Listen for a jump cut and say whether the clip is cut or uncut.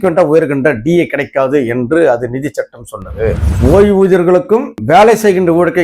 cut